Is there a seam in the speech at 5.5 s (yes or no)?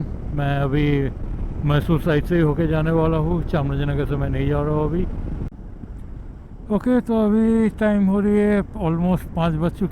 yes